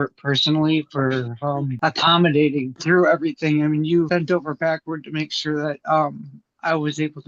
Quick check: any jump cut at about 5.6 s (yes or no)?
no